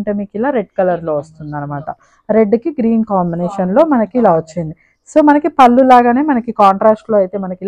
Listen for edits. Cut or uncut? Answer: uncut